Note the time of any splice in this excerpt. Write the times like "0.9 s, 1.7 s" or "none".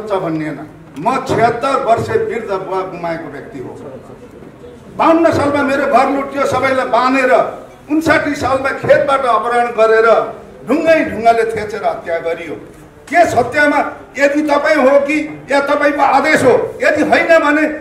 none